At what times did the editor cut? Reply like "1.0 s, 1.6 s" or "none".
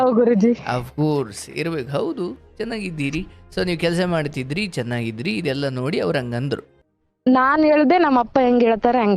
6.8 s